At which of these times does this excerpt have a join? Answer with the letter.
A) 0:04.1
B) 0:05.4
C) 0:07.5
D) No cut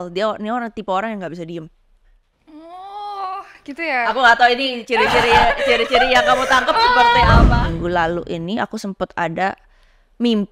C